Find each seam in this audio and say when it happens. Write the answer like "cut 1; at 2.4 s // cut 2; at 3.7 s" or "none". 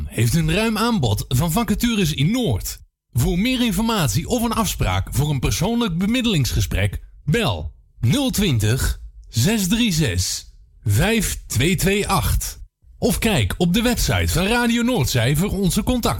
none